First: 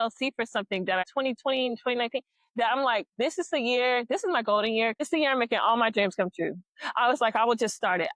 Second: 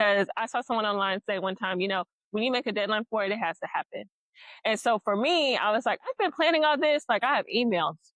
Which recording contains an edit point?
first; 2 cuts; at 1.1 s, 5.0 s

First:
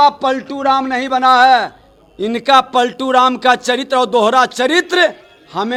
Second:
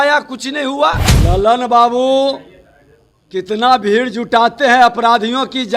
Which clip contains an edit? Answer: second; 1 cut; at 1.1 s

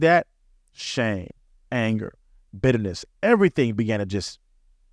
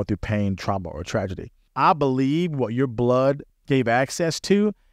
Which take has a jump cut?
second; 1 cut; at 1.6 s

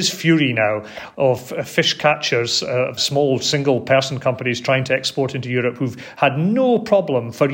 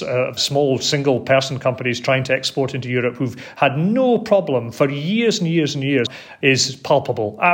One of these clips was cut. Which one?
second; 1 cut; at 6.1 s

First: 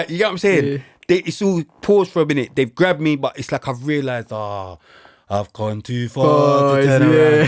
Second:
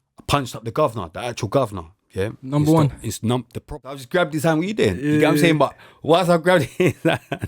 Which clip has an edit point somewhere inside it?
second; 1 cut; at 3.8 s

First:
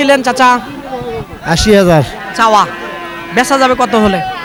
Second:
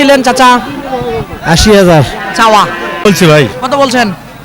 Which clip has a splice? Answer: second; 1 cut; at 3.1 s

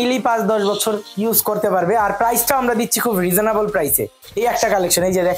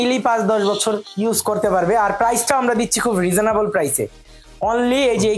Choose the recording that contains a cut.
first; 1 cut; at 4.2 s

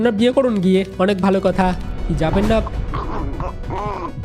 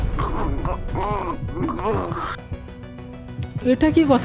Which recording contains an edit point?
first; 1 cut; at 1.8 s

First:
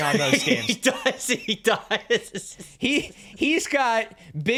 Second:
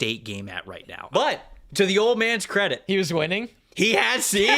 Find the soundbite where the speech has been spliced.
second; 1 cut; at 1.1 s

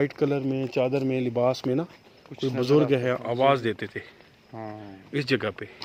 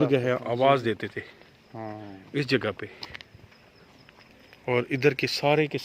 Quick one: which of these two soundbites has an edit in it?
second; 1 cut; at 4.3 s

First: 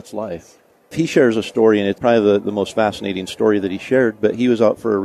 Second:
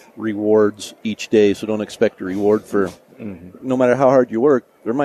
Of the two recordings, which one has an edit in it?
first; 2 cuts; at 0.7 s, 2.0 s

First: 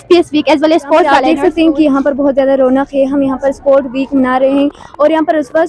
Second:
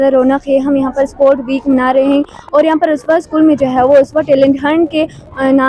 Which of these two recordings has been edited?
first; 1 cut; at 1.1 s

